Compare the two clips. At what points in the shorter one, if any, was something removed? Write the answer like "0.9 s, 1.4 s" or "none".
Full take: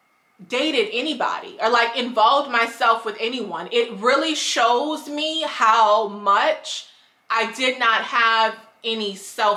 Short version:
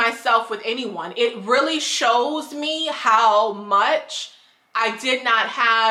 none

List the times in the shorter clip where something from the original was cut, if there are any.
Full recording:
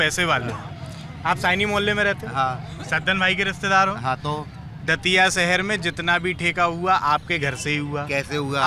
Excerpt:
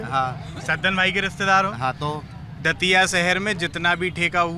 none

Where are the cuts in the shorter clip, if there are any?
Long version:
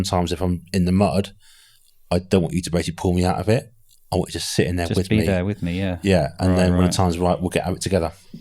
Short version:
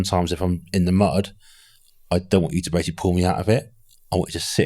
none

